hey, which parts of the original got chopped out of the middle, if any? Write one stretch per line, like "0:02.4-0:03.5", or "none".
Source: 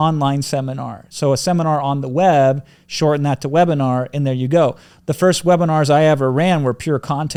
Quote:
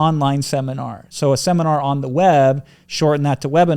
none